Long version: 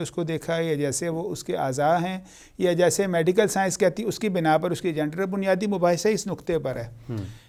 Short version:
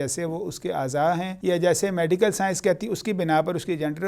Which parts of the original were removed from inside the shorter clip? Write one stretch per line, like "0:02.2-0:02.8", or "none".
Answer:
0:02.2-0:02.5